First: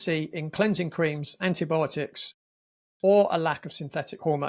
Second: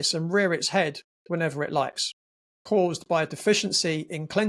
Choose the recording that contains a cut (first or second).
second